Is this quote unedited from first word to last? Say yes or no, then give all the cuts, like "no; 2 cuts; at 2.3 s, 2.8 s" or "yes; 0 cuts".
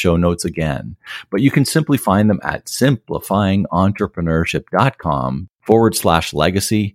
no; 1 cut; at 5.5 s